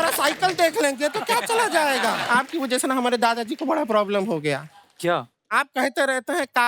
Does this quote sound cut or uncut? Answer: cut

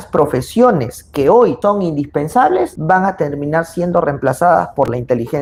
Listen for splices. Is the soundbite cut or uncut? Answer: uncut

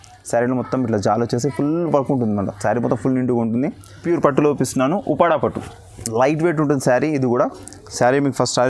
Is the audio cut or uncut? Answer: cut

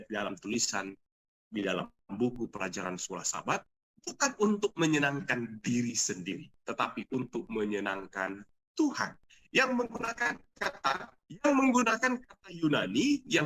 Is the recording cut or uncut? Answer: cut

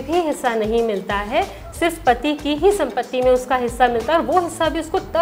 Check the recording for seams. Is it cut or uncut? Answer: uncut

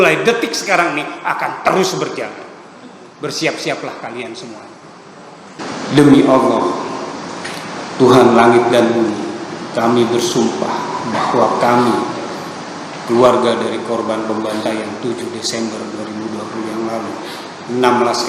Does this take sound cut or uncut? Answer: cut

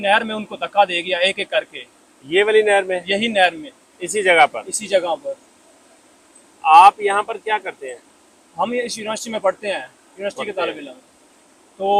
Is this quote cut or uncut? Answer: uncut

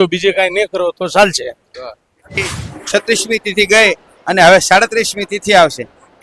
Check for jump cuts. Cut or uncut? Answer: cut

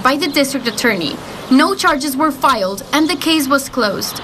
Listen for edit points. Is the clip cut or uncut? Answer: uncut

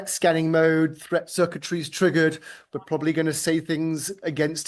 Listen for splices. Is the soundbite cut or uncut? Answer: uncut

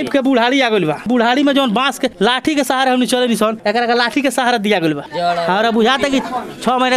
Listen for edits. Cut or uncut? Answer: uncut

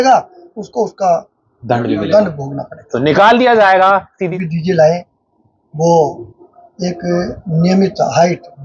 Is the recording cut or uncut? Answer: cut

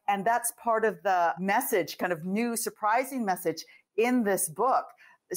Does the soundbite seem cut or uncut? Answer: cut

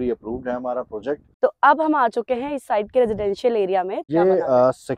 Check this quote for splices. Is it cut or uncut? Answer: cut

